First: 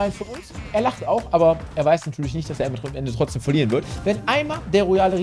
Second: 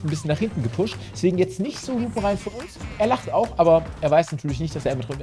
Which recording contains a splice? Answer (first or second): first